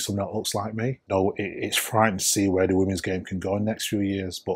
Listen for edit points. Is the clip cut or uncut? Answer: cut